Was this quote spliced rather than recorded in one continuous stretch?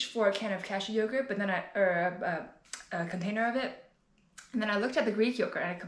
no; 0 cuts

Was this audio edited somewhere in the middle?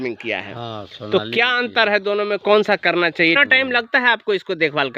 yes; 1 cut; at 3.4 s

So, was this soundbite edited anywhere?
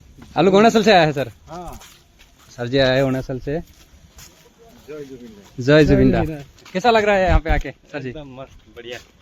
no; 0 cuts

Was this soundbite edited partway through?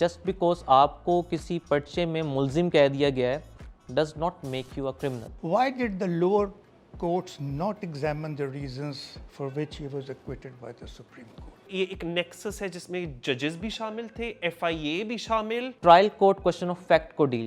yes; 3 cuts; at 5.3 s, 11.6 s, 15.7 s

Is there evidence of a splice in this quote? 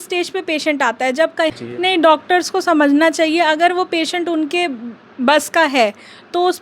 yes; 1 cut; at 1.6 s

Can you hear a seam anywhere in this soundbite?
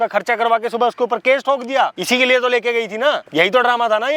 yes; 2 cuts; at 2.0 s, 3.2 s

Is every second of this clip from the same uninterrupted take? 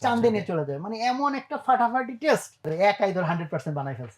no; 1 cut; at 2.7 s

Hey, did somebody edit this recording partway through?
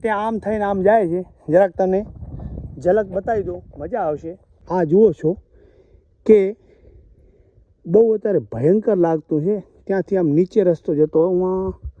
yes; 1 cut; at 4.6 s

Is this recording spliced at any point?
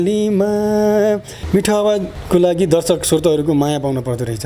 yes; 2 cuts; at 1.3 s, 2.2 s

